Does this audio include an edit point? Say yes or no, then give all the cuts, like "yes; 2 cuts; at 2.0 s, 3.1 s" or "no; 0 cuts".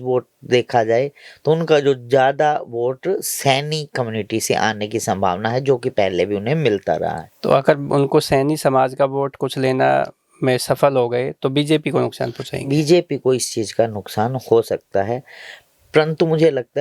no; 0 cuts